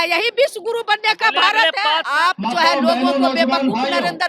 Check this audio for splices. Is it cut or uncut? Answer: cut